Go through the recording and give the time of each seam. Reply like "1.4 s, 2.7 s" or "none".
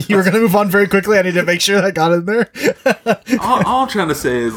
none

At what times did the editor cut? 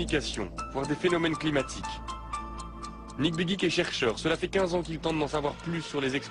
3.7 s

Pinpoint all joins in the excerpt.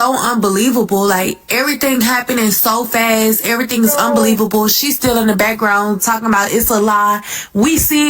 none

